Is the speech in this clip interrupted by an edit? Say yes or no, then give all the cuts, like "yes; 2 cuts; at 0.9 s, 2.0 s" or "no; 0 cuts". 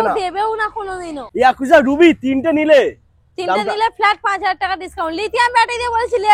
yes; 1 cut; at 1.2 s